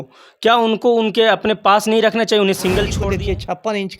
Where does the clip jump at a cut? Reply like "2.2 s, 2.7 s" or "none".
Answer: 3.0 s